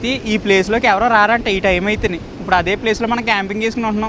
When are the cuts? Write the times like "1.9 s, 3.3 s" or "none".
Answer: none